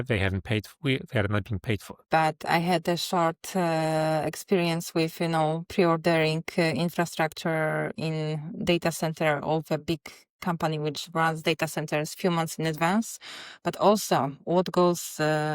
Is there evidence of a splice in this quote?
yes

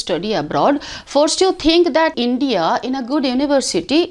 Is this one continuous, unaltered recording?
no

